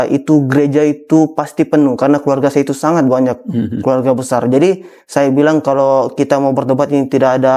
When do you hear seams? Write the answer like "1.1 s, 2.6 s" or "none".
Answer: none